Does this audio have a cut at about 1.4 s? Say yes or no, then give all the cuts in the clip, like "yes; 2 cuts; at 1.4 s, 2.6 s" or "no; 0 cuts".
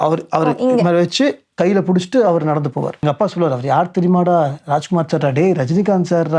no; 1 cut; at 3.0 s